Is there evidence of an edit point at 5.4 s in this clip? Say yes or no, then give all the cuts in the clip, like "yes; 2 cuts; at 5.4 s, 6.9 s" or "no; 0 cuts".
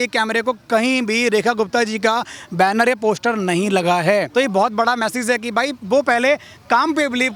no; 0 cuts